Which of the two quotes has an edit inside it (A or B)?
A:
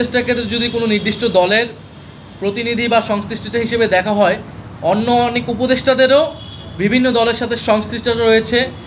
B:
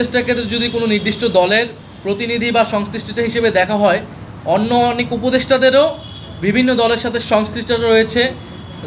B